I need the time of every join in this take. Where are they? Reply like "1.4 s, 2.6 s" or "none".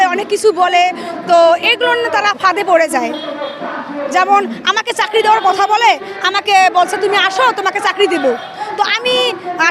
none